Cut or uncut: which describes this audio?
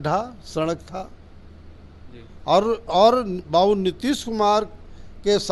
uncut